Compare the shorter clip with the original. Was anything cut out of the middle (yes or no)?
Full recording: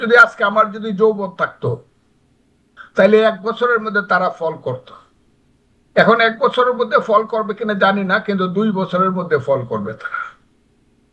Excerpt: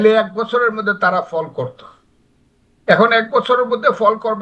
no